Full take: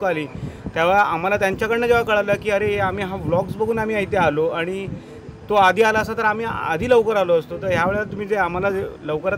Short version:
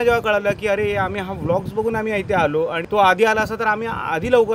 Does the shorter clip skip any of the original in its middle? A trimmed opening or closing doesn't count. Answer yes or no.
yes